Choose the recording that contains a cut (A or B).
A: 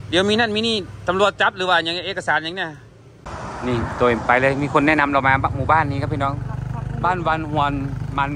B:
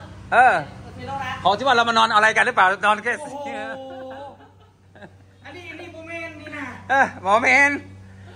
A